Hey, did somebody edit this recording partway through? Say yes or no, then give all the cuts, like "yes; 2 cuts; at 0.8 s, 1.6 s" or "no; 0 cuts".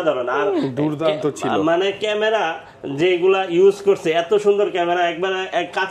no; 0 cuts